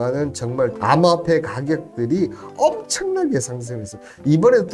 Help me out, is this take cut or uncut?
uncut